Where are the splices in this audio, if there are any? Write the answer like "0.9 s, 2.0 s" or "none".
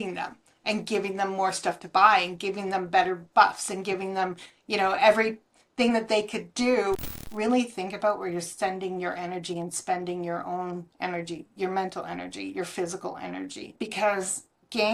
7.0 s, 13.6 s